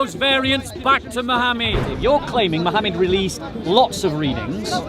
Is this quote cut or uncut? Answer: cut